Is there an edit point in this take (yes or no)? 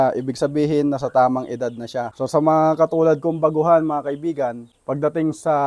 no